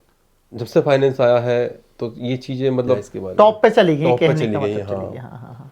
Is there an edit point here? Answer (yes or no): yes